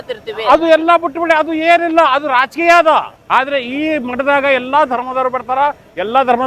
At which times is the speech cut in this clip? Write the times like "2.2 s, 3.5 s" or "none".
3.2 s